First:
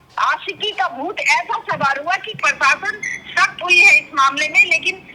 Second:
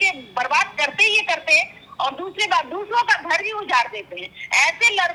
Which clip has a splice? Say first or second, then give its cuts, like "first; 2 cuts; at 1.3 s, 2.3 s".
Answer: first; 1 cut; at 2.3 s